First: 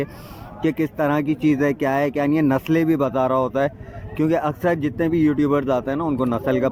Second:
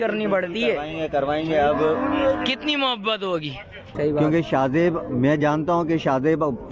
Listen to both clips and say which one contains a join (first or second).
second